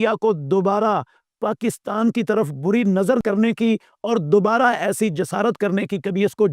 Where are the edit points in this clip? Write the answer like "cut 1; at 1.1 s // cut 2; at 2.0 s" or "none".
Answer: cut 1; at 3.2 s

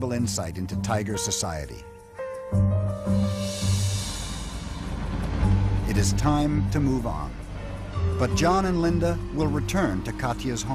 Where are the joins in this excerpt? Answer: cut 1; at 8.9 s

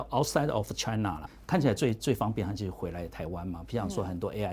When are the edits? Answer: cut 1; at 1.3 s

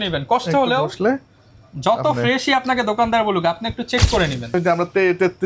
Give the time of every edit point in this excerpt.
cut 1; at 4.5 s

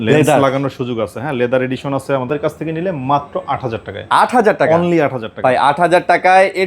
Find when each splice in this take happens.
cut 1; at 2.3 s

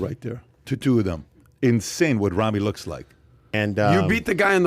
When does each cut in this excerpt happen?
cut 1; at 3.5 s

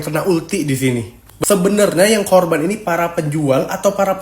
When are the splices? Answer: cut 1; at 1.2 s

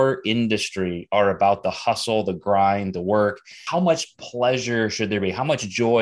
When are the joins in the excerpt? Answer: cut 1; at 3.6 s

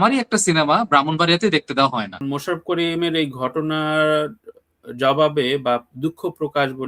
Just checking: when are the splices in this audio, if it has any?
cut 1; at 2.2 s

